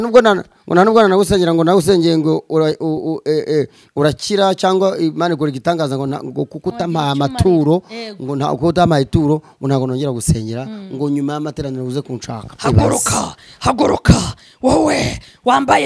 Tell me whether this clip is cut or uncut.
uncut